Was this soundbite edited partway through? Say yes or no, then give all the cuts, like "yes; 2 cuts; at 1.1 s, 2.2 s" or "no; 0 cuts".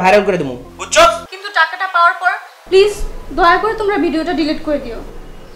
yes; 1 cut; at 1.3 s